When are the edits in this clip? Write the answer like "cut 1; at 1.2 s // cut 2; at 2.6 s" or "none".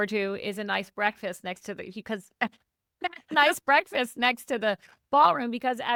none